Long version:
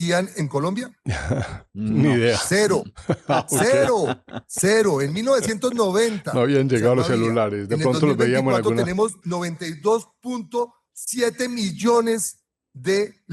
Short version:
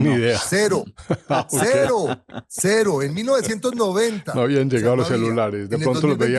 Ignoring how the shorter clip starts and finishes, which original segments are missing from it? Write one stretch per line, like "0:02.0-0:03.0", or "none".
none